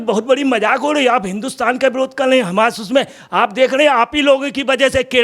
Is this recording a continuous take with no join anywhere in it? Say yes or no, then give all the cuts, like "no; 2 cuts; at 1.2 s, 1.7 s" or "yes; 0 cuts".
yes; 0 cuts